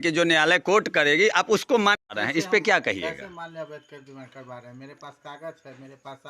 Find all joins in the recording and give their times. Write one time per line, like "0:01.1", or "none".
0:02.1